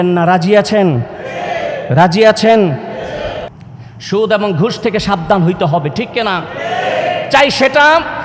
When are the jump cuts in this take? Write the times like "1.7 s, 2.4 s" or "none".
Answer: 3.5 s

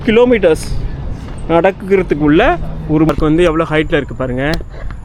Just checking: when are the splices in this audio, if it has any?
3.1 s

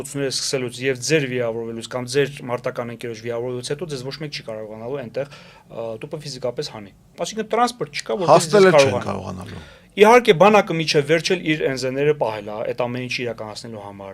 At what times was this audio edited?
none

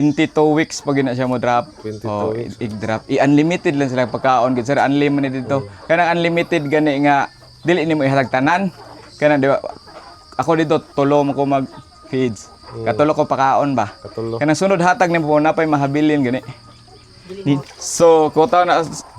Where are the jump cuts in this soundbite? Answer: 17.8 s

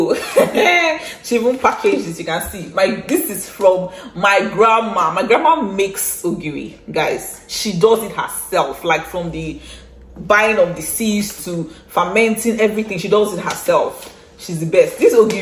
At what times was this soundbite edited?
none

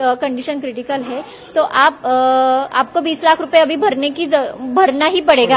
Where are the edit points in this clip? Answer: none

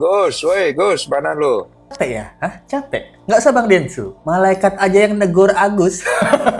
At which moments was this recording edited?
1.9 s

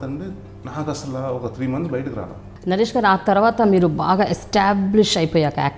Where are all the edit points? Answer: 2.5 s

